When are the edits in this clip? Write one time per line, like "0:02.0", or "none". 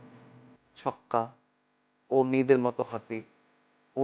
0:01.9